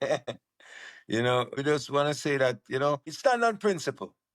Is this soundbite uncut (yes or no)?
no